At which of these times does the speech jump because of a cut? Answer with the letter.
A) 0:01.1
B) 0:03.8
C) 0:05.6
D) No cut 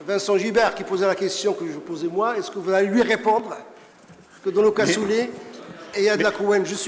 D